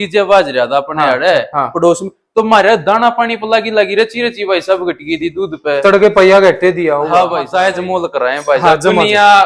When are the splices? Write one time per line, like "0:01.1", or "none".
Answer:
0:07.4